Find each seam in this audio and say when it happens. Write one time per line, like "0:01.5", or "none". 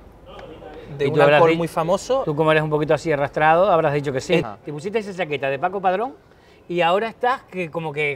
0:04.4